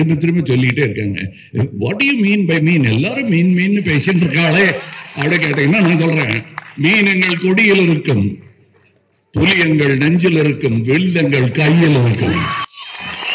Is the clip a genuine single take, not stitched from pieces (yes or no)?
yes